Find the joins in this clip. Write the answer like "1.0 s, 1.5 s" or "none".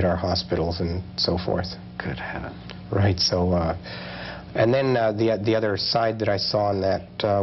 none